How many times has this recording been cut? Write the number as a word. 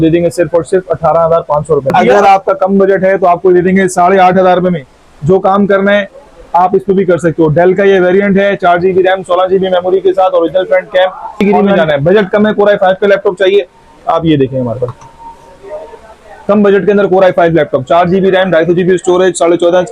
two